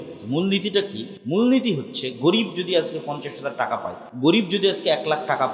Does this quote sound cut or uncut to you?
cut